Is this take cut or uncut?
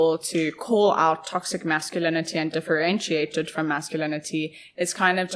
uncut